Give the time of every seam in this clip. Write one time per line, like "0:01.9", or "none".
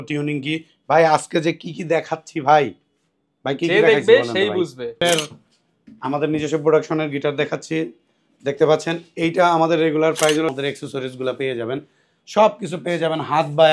0:05.0
0:10.5